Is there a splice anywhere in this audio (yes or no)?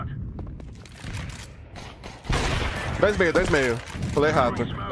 no